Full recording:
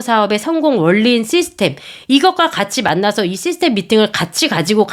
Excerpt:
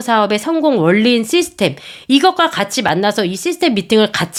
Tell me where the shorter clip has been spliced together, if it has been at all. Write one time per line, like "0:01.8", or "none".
none